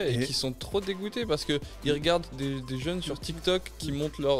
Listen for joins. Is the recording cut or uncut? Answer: uncut